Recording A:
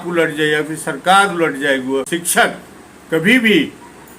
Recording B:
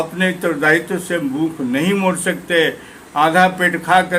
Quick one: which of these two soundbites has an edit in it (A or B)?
A